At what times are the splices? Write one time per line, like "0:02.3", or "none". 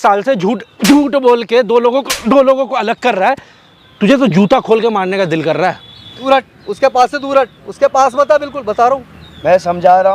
0:06.1